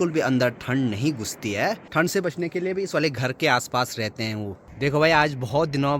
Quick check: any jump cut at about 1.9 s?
yes; 2 cuts; at 1.9 s, 4.6 s

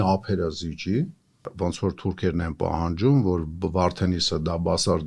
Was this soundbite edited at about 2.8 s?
no; 1 cut; at 1.5 s

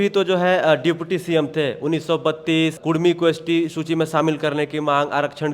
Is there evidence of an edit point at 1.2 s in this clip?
no; 1 cut; at 2.8 s

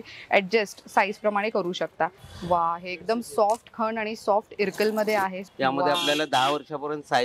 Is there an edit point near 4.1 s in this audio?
no; 2 cuts; at 2.3 s, 5.4 s

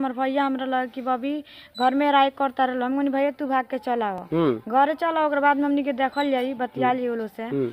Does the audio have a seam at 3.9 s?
no; 0 cuts

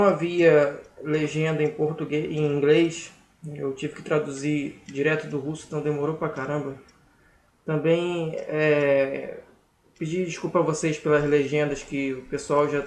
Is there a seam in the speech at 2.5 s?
no; 1 cut; at 8.9 s

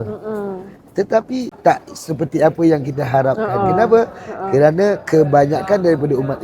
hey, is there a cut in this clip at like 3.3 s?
no; 1 cut; at 1.5 s

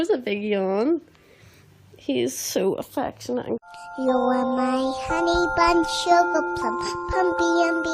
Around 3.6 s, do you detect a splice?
yes; 1 cut; at 3.6 s

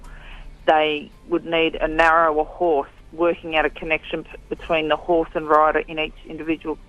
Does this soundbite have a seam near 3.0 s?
yes; 1 cut; at 3.0 s

